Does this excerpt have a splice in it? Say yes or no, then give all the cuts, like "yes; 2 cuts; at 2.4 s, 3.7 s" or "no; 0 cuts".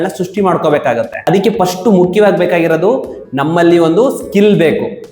no; 0 cuts